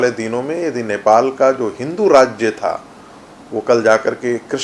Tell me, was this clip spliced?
no; 0 cuts

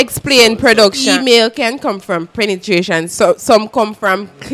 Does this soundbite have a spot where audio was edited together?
yes; 1 cut; at 1.0 s

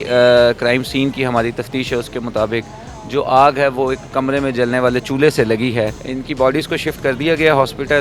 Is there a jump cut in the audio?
yes; 1 cut; at 6.1 s

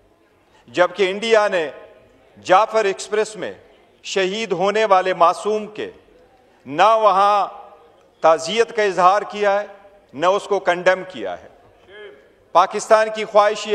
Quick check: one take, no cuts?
yes; 0 cuts

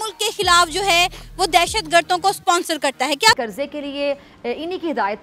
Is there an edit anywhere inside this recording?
yes; 1 cut; at 3.4 s

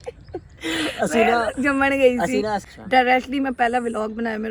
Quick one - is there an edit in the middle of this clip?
yes; 1 cut; at 2.7 s

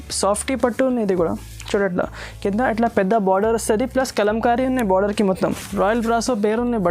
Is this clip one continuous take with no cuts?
no; 1 cut; at 5.6 s

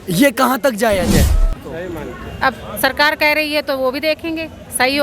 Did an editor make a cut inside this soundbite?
yes; 1 cut; at 1.2 s

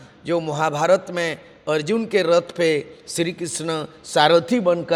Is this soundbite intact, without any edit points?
yes; 0 cuts

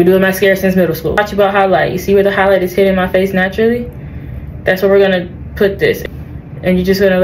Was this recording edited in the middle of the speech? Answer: yes; 2 cuts; at 1.2 s, 6.0 s

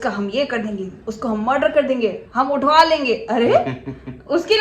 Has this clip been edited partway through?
no; 0 cuts

